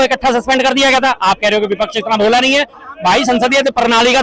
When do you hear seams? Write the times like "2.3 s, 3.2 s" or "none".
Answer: none